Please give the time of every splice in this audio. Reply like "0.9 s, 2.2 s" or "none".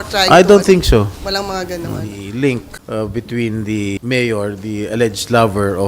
2.2 s, 2.7 s, 4.0 s